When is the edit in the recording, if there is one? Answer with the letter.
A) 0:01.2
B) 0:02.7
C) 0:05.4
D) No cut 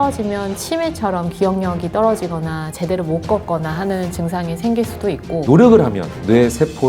C